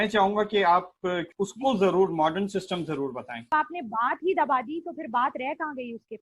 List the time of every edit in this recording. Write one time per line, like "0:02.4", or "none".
0:01.3
0:03.5